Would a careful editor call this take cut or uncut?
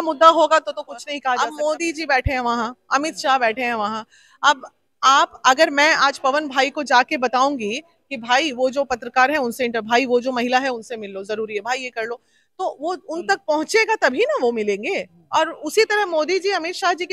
cut